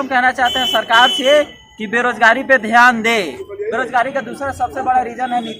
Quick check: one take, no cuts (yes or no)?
no